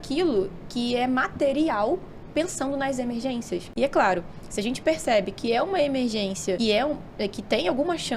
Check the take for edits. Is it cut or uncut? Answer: cut